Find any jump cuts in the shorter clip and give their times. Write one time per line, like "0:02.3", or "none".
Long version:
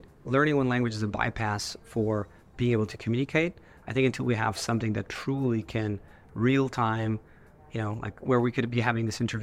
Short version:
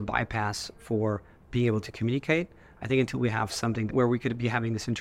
0:03.9